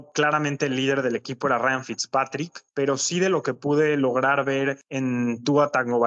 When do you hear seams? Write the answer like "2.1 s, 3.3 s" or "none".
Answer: none